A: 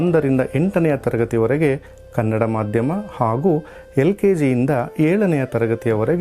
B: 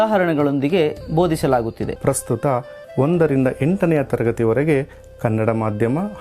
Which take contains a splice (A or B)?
B